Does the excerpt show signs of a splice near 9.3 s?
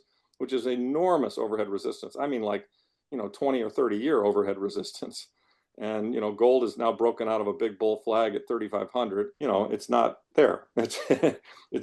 yes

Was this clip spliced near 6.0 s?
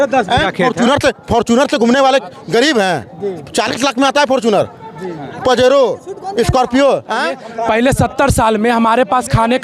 no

